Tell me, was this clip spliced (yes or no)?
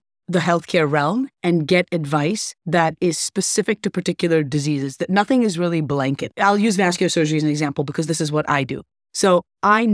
yes